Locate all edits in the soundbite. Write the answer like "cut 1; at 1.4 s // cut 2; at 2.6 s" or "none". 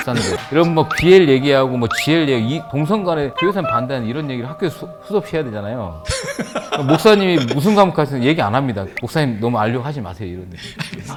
none